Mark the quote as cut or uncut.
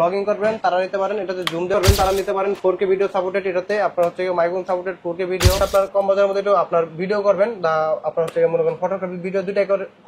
cut